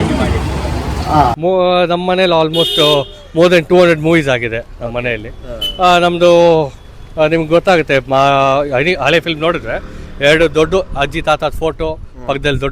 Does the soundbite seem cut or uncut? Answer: cut